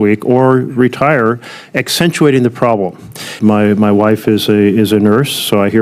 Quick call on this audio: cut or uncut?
cut